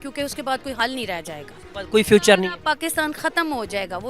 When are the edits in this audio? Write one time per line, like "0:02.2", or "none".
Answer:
none